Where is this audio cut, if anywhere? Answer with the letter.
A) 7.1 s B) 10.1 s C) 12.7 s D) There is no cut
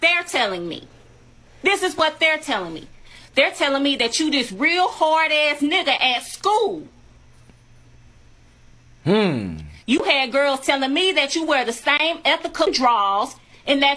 C